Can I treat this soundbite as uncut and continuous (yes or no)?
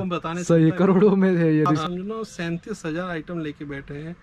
no